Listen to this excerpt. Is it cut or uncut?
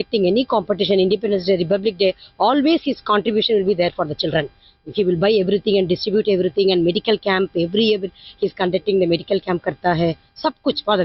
uncut